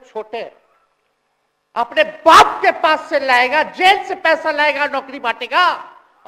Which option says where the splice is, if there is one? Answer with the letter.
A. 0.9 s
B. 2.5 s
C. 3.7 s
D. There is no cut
D